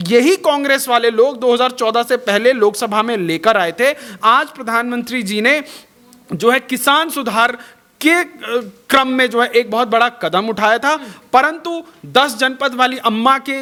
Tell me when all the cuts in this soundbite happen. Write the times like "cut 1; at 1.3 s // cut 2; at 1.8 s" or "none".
none